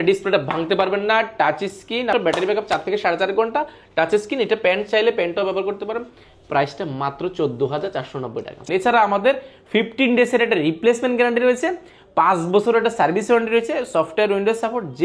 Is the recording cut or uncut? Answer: cut